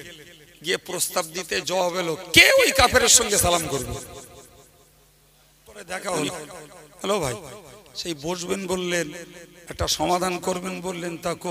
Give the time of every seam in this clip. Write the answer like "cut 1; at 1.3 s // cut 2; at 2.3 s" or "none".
cut 1; at 5.9 s